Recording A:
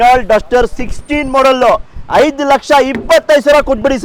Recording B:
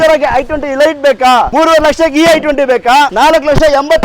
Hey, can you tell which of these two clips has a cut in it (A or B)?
B